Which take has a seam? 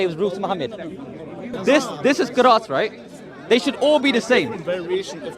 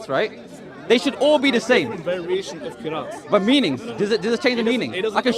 first; 1 cut; at 1.5 s

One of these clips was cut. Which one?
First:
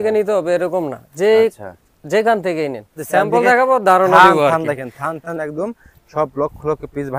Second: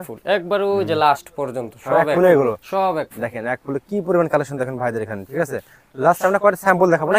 first; 1 cut; at 3.0 s

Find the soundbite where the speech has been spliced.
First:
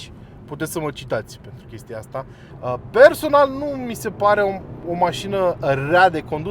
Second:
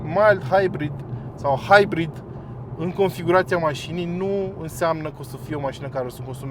first; 1 cut; at 2.4 s

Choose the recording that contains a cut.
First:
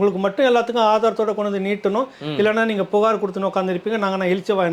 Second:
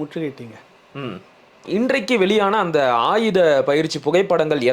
second; 1 cut; at 1.6 s

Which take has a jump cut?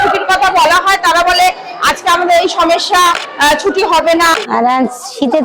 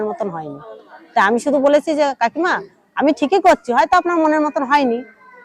first; 2 cuts; at 3.3 s, 4.3 s

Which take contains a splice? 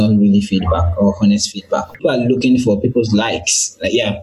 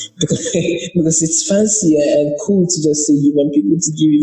first; 1 cut; at 2.0 s

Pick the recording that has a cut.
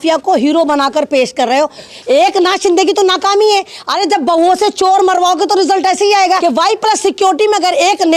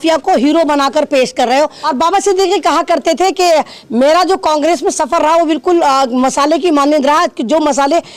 first; 2 cuts; at 1.9 s, 6.4 s

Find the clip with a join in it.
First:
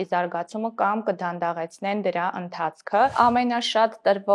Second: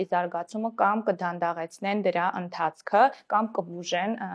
first; 1 cut; at 3.1 s

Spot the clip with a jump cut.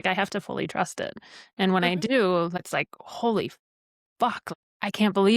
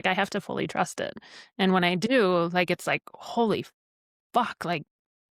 first; 2 cuts; at 2.6 s, 4.4 s

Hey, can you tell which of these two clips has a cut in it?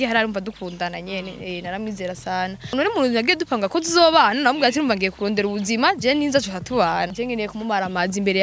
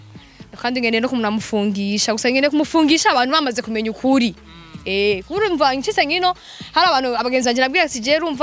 first; 2 cuts; at 2.8 s, 7.1 s

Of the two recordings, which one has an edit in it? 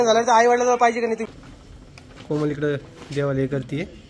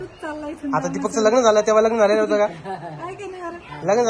first; 1 cut; at 1.3 s

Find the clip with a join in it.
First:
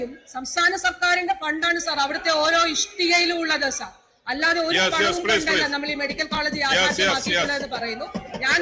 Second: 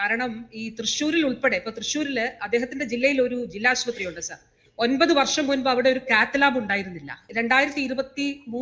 second; 1 cut; at 7.3 s

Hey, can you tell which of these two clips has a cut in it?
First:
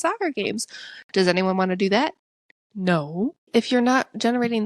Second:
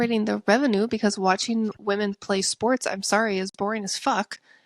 first; 1 cut; at 3.5 s

